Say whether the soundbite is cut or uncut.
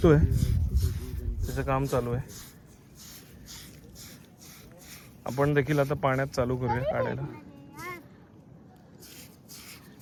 uncut